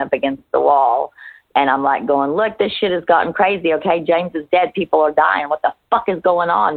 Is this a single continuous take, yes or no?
yes